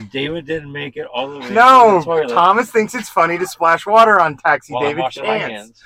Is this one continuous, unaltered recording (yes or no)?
yes